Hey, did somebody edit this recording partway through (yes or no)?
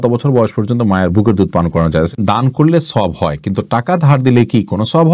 yes